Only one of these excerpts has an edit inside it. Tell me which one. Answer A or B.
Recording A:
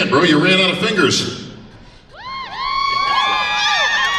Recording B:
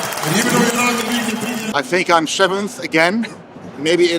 B